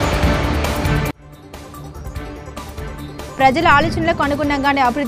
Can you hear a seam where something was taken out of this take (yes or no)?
no